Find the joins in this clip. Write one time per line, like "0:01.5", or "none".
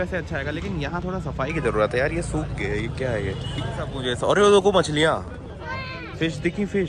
0:04.1